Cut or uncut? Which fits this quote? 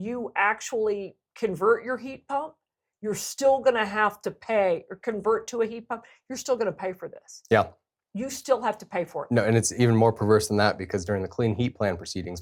uncut